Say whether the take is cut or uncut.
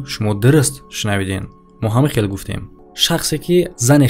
cut